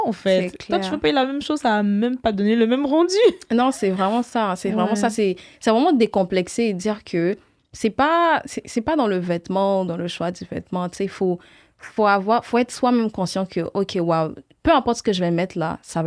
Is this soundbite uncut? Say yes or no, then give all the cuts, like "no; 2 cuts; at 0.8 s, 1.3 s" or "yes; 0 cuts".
yes; 0 cuts